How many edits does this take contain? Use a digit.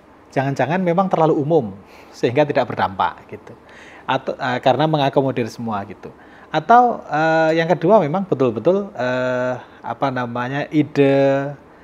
0